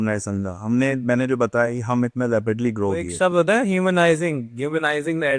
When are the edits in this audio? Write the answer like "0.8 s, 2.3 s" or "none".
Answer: 3.1 s

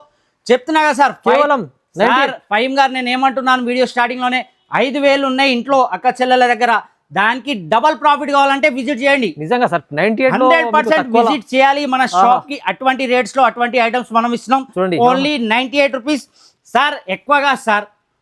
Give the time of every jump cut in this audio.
none

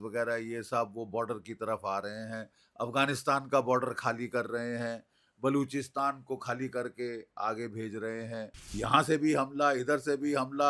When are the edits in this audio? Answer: 8.7 s

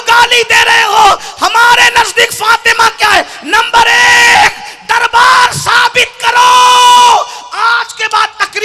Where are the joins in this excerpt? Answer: none

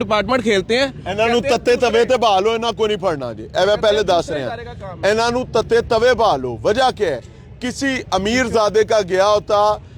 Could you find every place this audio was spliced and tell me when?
none

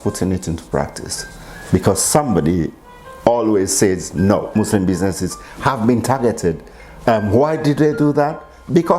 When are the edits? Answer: 4.5 s

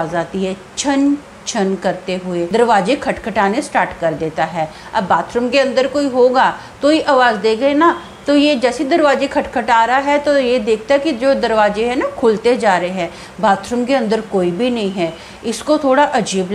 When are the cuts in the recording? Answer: 2.5 s

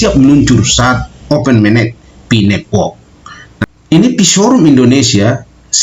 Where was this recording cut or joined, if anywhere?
3.3 s

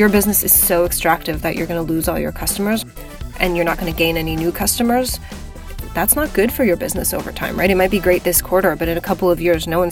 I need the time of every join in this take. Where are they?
2.8 s

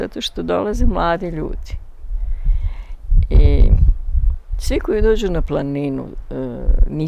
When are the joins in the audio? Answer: none

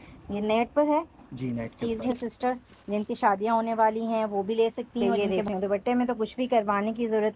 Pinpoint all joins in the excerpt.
1.8 s, 5.1 s

